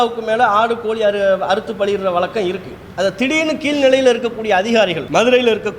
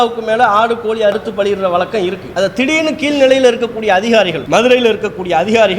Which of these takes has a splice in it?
second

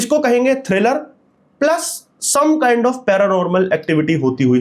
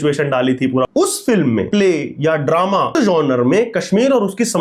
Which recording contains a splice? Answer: second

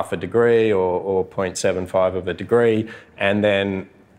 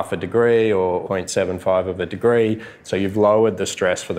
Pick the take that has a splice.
second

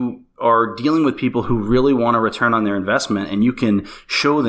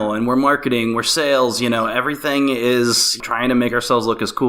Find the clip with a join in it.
second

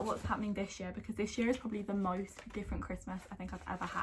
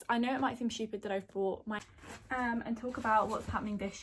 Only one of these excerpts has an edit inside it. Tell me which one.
second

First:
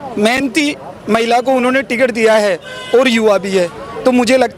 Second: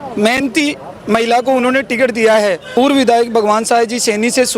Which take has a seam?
second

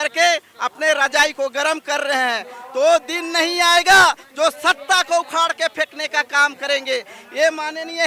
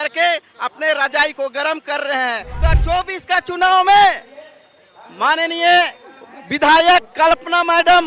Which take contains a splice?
second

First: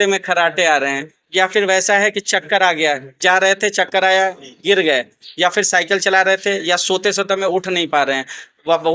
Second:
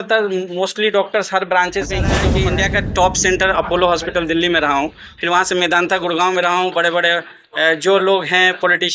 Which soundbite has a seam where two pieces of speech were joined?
second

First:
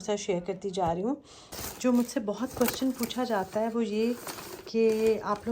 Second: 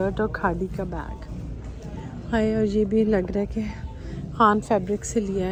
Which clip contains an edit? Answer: first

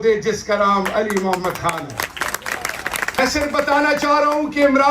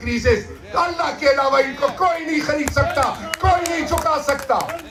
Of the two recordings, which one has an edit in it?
first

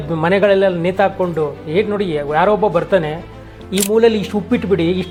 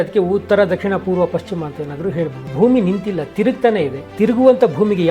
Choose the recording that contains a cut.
second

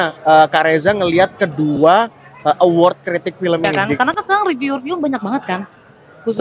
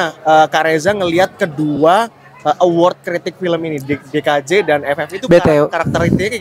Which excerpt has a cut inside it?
first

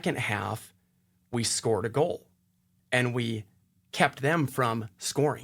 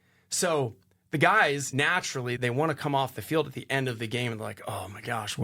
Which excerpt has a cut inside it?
second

